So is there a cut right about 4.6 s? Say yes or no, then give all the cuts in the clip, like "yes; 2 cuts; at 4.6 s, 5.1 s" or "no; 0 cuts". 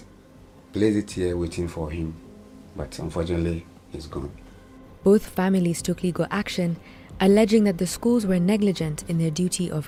no; 0 cuts